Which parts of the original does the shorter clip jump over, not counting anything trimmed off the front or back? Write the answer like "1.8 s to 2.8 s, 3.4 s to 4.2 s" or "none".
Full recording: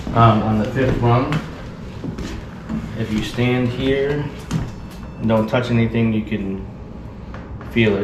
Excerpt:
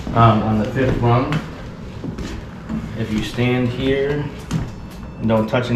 none